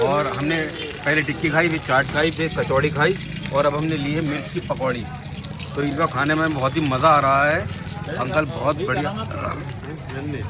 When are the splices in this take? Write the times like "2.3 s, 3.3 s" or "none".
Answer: none